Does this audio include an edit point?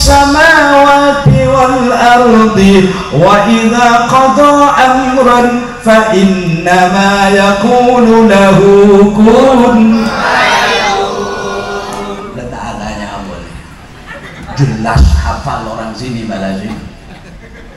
no; 0 cuts

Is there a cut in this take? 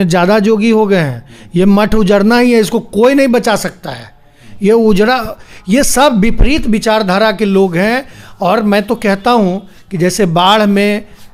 no; 0 cuts

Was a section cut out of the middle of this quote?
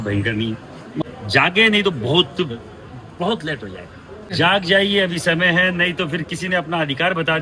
yes; 2 cuts; at 1.0 s, 4.3 s

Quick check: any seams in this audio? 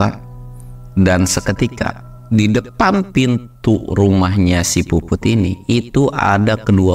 no; 0 cuts

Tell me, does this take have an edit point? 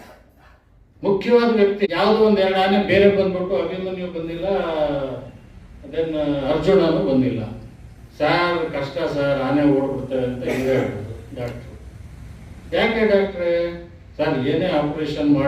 yes; 1 cut; at 1.9 s

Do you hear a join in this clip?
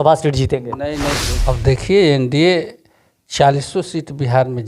yes; 1 cut; at 1.3 s

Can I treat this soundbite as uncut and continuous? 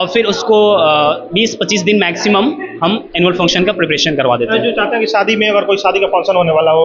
yes; 0 cuts

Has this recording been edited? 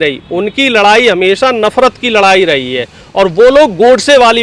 no; 0 cuts

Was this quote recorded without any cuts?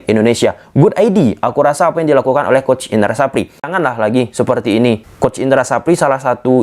no; 2 cuts; at 3.7 s, 5.1 s

